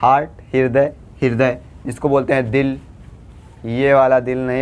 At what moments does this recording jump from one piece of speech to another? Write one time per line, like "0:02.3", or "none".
0:01.0